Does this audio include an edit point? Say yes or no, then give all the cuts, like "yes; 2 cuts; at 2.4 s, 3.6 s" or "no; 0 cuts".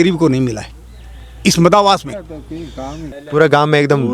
yes; 1 cut; at 3.0 s